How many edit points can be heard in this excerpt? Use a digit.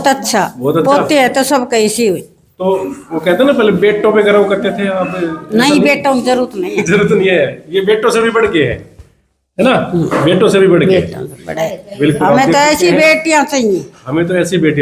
0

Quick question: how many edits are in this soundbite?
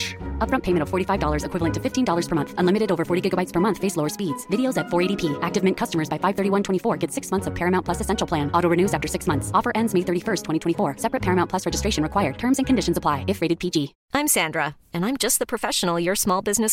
1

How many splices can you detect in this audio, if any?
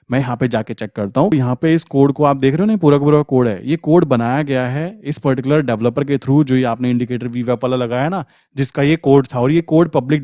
1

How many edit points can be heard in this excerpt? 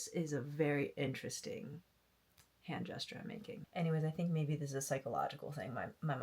1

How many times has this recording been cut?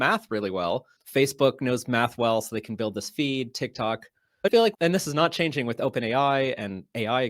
2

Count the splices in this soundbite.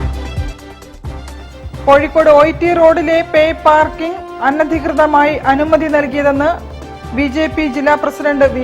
1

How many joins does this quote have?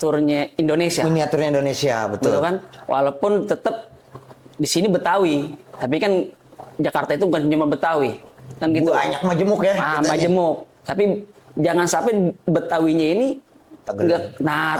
0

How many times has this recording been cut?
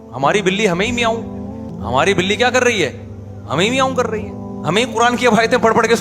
1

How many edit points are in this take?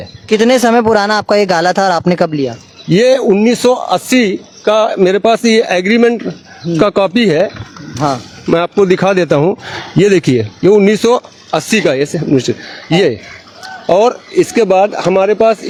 0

